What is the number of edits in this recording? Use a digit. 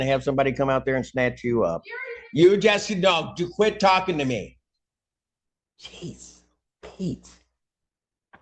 0